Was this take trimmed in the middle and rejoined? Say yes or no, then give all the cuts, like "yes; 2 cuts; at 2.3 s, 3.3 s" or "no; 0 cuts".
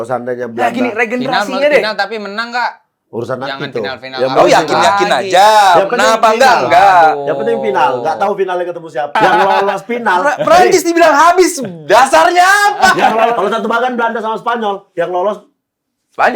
yes; 2 cuts; at 9.1 s, 13.4 s